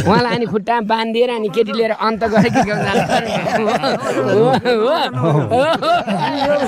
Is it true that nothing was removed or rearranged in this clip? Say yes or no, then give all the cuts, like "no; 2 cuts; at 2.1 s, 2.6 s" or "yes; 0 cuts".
yes; 0 cuts